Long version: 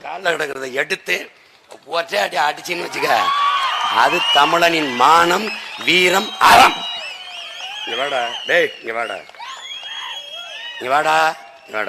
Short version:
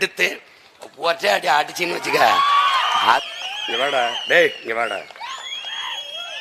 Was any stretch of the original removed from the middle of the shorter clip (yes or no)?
yes